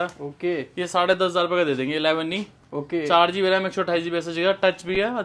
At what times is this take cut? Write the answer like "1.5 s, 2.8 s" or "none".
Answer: none